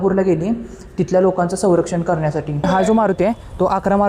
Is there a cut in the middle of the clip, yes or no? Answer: yes